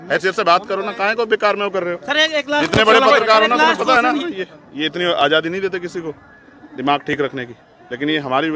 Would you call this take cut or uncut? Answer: cut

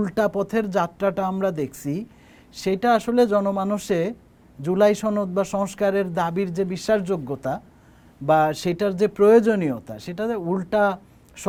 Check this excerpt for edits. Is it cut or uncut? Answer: uncut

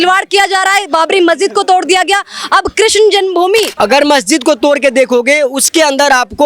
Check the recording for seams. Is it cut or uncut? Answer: cut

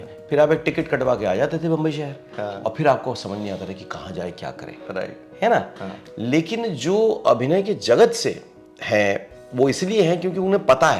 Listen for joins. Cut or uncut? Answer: uncut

